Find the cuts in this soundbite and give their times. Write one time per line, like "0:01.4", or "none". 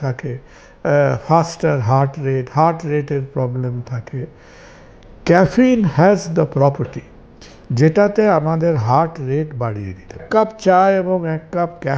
0:10.2